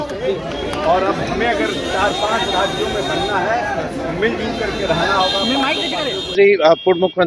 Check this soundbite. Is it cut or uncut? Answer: cut